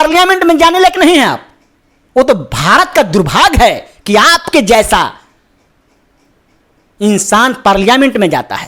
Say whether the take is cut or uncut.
uncut